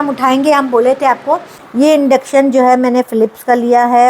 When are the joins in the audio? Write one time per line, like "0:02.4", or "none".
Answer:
0:01.6